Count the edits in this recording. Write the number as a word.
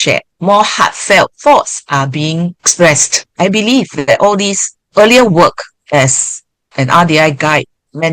one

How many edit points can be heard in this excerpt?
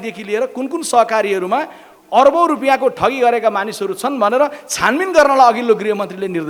zero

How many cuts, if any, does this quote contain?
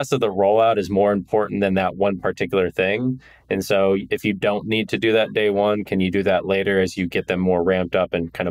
zero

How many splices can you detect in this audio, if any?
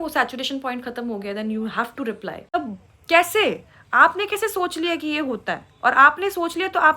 one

